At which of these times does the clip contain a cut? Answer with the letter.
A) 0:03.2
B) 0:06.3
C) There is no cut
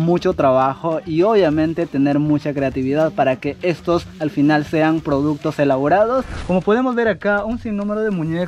B